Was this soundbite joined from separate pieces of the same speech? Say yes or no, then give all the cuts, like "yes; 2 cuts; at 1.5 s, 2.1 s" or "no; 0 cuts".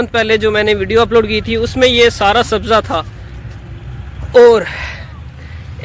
no; 0 cuts